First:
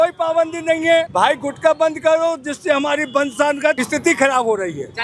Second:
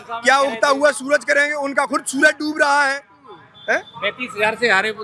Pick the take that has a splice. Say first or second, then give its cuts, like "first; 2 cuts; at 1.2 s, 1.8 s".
first; 2 cuts; at 1.1 s, 3.8 s